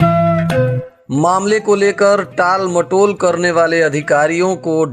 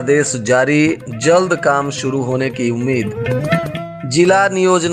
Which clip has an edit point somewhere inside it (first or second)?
first